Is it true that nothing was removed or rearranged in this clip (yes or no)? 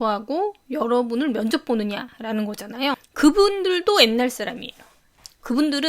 no